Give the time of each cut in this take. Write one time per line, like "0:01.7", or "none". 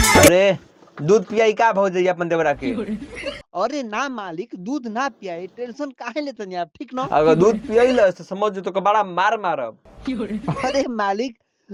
none